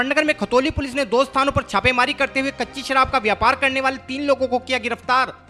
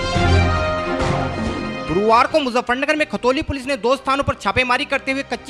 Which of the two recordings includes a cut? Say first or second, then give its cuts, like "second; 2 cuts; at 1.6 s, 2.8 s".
second; 1 cut; at 1.6 s